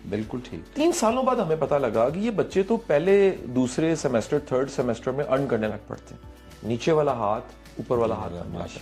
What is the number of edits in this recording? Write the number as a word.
zero